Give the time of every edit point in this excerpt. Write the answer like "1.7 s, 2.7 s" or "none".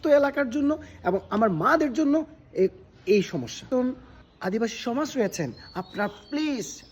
3.6 s